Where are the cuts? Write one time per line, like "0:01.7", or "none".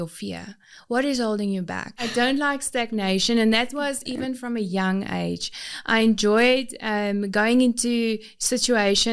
0:02.0